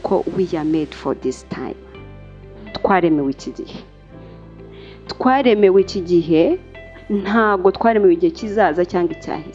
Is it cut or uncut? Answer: uncut